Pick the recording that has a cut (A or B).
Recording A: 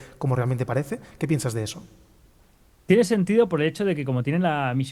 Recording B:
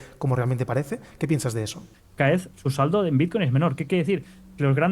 B